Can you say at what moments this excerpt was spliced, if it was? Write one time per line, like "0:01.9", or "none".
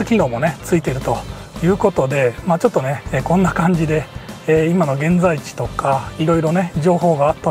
none